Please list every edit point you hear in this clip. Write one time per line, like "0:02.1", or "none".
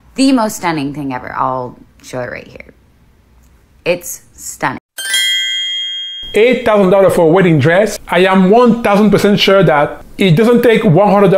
none